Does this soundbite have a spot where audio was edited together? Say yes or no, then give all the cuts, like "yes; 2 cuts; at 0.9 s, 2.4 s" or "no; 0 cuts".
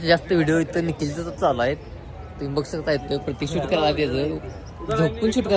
no; 0 cuts